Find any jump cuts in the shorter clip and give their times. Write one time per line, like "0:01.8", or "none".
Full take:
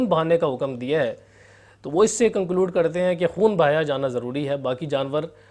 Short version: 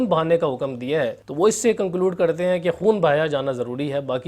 0:01.2